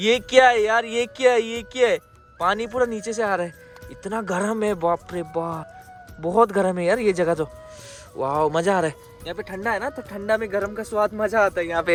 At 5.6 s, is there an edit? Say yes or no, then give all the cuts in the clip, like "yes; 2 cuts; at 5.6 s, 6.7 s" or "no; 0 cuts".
no; 0 cuts